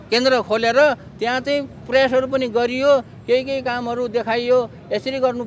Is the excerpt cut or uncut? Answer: uncut